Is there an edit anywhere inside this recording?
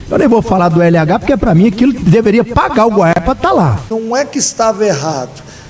yes; 1 cut; at 3.9 s

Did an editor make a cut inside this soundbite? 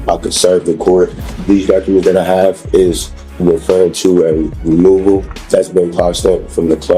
yes; 2 cuts; at 1.3 s, 5.3 s

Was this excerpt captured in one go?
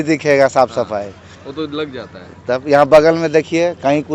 yes; 0 cuts

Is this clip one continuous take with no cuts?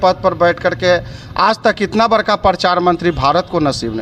yes; 0 cuts

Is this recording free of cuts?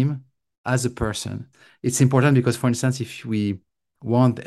no; 1 cut; at 1.5 s

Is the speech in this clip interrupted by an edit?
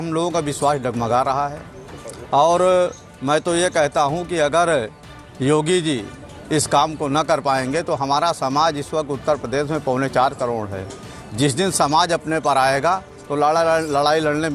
no; 0 cuts

